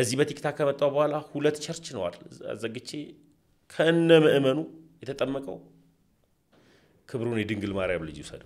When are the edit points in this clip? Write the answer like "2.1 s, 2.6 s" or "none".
none